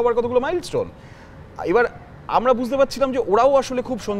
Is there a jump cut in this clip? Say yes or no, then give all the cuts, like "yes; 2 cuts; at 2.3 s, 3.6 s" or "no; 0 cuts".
no; 0 cuts